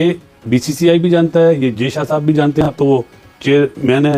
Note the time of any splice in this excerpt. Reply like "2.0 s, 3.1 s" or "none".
none